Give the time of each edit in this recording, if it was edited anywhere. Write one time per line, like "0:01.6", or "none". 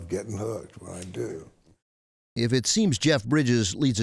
0:01.9